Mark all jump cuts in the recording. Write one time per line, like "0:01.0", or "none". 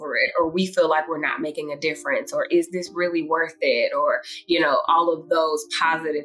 none